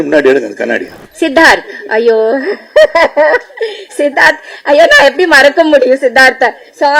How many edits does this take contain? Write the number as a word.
one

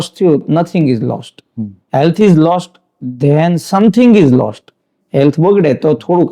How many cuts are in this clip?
zero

